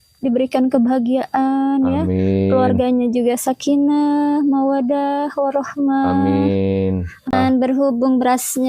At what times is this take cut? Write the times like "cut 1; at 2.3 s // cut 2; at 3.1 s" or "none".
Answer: cut 1; at 7.3 s